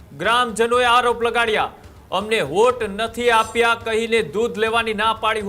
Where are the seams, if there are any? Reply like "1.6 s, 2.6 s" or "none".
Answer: none